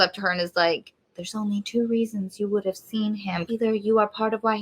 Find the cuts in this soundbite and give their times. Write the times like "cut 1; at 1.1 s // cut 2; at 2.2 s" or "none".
cut 1; at 3.4 s